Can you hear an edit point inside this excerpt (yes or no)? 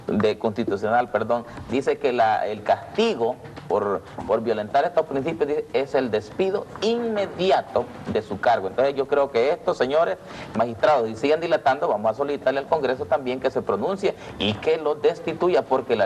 yes